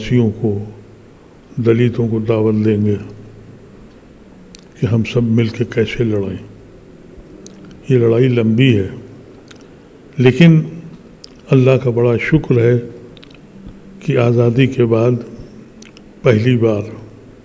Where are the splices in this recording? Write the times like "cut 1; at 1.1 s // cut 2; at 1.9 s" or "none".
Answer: none